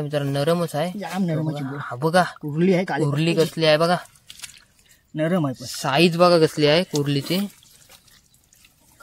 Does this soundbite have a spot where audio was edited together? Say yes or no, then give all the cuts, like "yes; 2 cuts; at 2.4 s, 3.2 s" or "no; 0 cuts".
no; 0 cuts